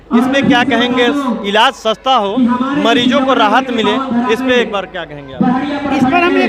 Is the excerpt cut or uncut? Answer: uncut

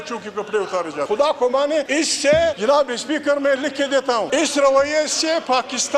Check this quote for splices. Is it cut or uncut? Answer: cut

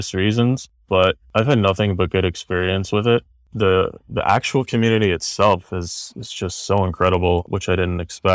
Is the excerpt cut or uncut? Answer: cut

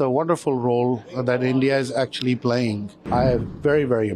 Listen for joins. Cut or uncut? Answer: cut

